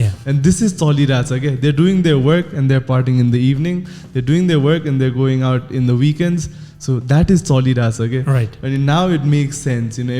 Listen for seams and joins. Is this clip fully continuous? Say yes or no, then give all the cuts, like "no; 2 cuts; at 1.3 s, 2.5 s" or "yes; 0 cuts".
yes; 0 cuts